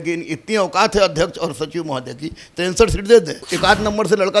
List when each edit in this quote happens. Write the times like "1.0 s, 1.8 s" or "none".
3.4 s